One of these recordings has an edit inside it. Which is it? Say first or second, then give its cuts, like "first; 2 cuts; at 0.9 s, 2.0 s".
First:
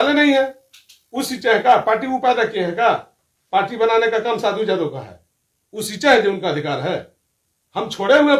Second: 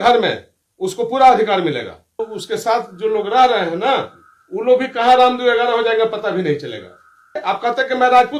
second; 2 cuts; at 2.2 s, 7.4 s